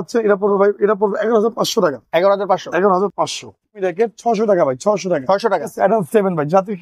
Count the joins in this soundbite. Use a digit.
2